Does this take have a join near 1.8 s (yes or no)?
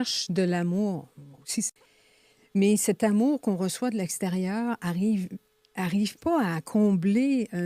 yes